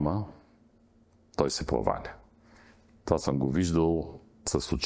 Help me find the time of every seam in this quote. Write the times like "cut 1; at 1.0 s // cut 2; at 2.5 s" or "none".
none